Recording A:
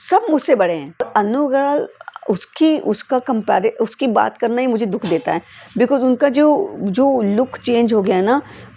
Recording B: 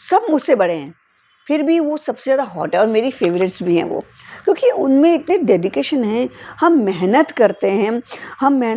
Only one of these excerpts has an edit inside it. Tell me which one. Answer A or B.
A